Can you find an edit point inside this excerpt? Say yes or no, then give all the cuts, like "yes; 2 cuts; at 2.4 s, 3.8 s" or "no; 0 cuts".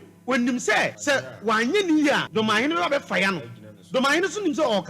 yes; 2 cuts; at 1.0 s, 2.3 s